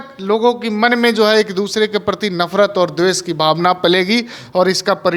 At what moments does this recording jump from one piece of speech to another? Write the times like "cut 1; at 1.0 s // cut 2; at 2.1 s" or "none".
none